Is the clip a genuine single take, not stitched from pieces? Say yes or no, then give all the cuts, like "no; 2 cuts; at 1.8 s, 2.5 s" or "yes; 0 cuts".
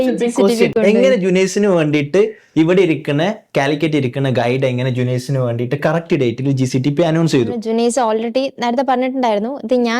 no; 1 cut; at 7.6 s